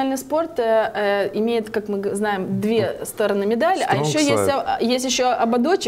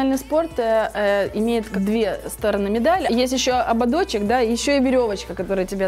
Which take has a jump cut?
second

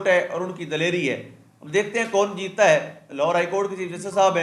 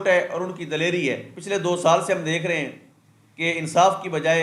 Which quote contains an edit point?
second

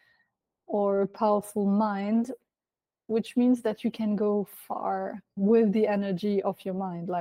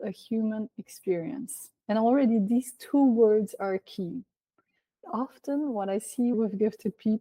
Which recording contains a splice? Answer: second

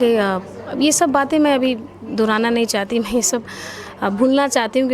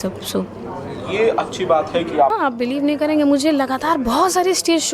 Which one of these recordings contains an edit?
second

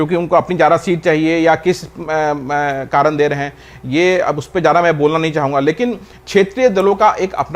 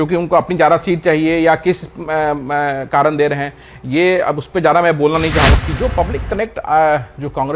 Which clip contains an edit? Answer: second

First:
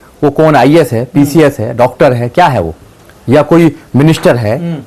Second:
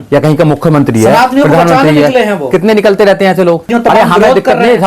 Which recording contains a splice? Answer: second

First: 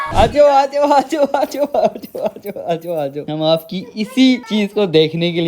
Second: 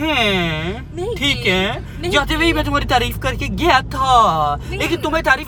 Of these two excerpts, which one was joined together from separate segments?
first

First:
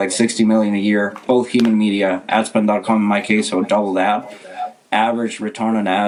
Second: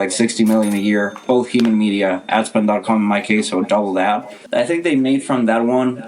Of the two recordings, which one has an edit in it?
second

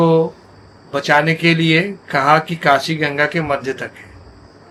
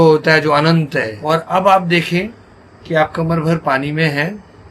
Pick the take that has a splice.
second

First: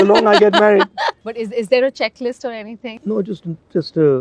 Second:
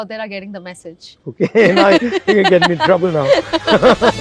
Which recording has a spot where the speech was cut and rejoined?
first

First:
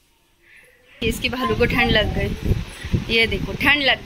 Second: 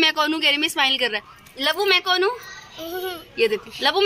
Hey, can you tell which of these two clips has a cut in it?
first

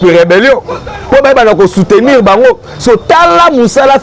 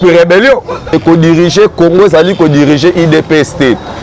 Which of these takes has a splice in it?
second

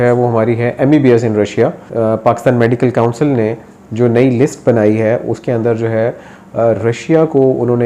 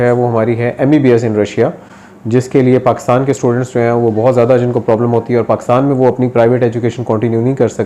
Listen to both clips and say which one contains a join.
first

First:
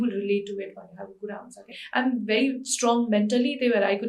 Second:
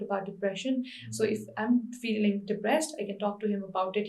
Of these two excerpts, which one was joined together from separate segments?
first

